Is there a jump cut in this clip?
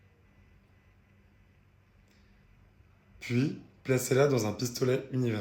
yes; 1 cut; at 2.1 s

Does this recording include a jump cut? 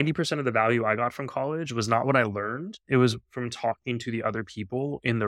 no; 0 cuts

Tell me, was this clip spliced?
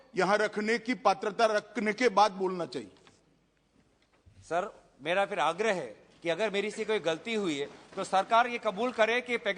no; 0 cuts

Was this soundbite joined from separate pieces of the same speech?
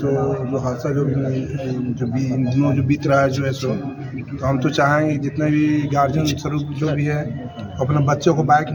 no; 0 cuts

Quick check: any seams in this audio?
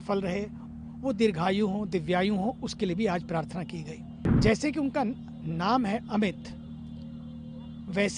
yes; 1 cut; at 4.2 s

